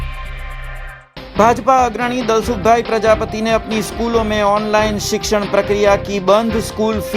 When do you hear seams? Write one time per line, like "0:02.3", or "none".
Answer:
0:01.0